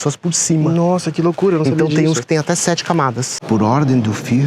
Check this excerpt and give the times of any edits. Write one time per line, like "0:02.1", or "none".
0:03.3